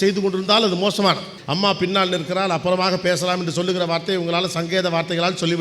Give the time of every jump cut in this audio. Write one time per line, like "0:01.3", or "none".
0:01.3